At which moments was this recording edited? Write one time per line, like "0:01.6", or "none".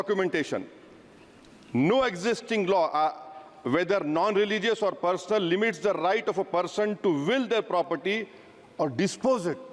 none